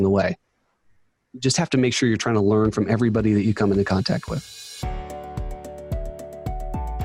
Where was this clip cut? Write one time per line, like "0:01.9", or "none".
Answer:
0:04.6